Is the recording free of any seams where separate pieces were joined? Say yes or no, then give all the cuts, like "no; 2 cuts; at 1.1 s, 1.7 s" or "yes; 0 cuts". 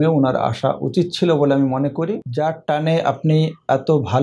no; 1 cut; at 2.2 s